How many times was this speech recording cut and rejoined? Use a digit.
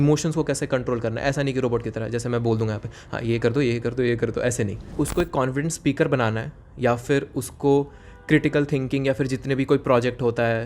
1